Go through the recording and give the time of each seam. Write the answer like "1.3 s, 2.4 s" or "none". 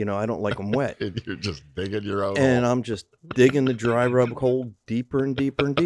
none